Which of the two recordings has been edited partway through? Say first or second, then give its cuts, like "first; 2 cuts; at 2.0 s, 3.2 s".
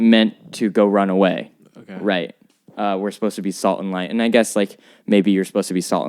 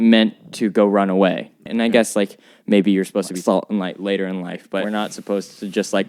second; 3 cuts; at 1.6 s, 3.3 s, 4.8 s